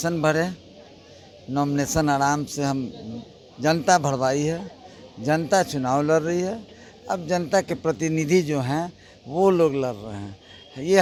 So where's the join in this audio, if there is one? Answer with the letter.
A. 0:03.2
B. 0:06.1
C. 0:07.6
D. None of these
D